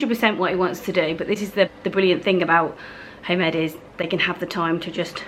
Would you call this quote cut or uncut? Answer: uncut